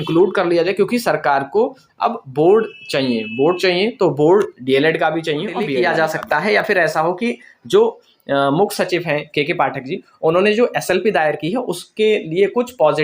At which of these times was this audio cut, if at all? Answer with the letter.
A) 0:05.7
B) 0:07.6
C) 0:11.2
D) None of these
A